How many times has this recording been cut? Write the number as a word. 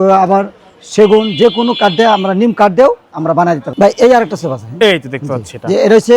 one